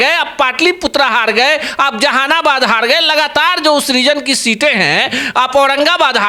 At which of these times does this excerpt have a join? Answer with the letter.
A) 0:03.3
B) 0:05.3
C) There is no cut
C